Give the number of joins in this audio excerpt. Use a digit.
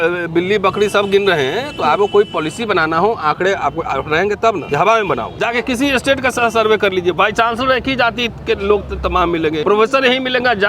3